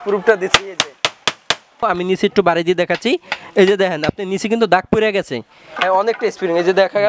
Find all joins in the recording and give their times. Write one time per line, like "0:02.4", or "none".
0:01.8
0:05.7